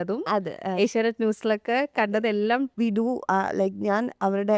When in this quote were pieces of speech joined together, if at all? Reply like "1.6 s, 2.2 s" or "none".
2.7 s